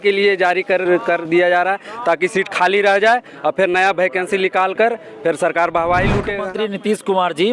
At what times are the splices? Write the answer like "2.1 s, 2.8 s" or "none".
6.5 s

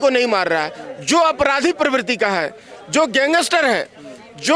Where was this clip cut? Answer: none

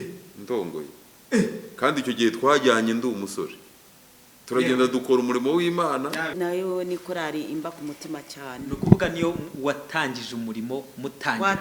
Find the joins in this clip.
6.3 s

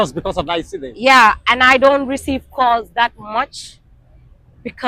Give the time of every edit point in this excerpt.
none

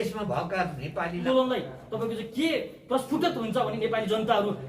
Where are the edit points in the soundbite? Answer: 1.2 s

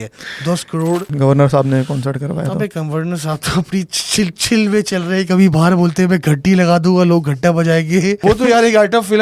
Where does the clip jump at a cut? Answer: 1.1 s, 8.2 s

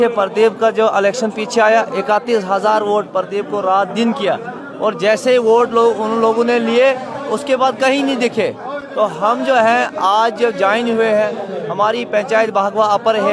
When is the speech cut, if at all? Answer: none

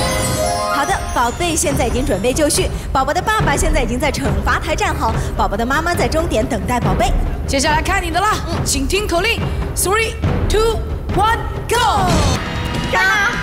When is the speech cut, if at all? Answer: 12.4 s

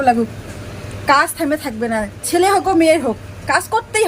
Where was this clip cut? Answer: none

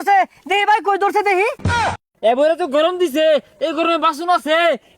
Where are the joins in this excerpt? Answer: 1.9 s

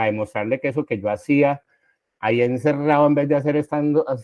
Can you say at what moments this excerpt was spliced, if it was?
none

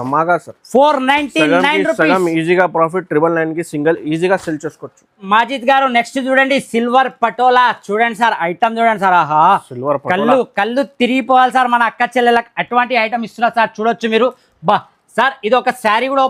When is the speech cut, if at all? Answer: none

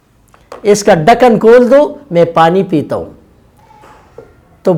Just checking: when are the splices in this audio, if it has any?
none

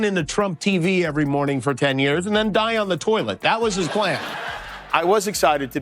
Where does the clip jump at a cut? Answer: 4.4 s

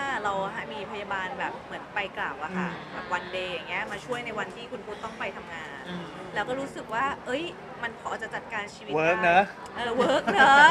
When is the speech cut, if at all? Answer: none

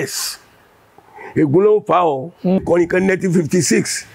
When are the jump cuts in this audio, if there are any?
2.6 s

